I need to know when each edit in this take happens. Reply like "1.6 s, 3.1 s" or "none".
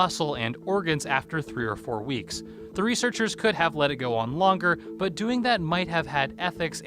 4.1 s

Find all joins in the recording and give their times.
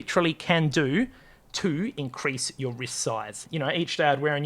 3.4 s

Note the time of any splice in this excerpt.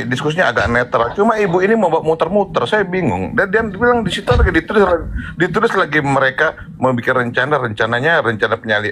none

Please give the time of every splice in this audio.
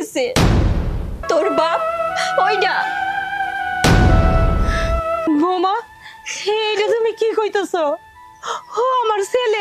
1.2 s, 5.3 s

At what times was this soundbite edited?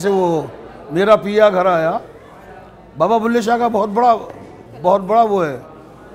none

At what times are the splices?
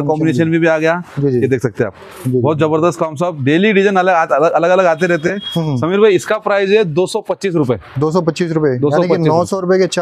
none

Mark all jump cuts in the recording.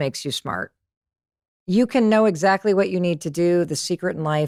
none

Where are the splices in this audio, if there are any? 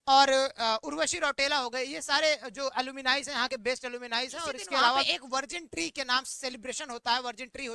5.1 s

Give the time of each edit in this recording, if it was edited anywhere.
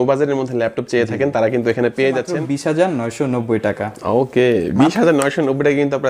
2.3 s

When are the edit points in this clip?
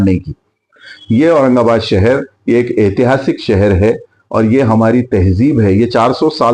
0.9 s

